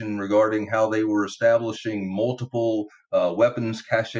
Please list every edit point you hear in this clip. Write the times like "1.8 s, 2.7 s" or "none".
none

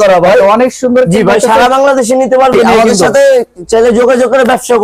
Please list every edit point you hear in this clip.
2.5 s

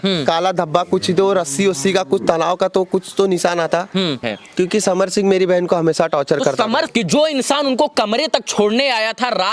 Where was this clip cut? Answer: 4.2 s, 6.9 s

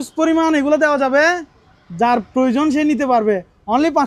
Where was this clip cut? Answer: none

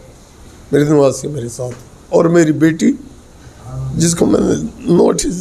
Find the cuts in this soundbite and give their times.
none

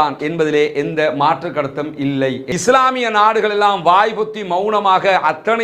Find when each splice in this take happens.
2.4 s

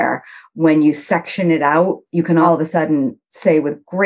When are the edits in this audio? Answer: 2.4 s

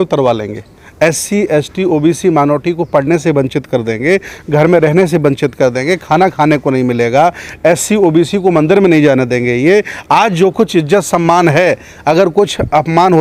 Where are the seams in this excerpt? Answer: none

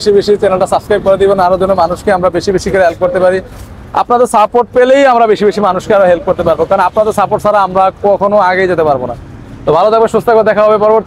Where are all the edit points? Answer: none

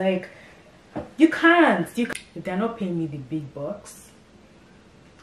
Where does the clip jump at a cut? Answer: 2.1 s

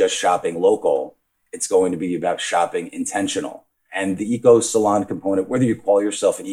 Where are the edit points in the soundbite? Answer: 3.8 s

